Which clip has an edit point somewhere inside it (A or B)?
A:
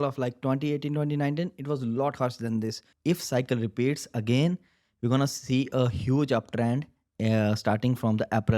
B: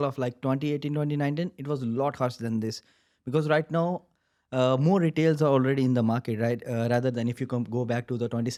A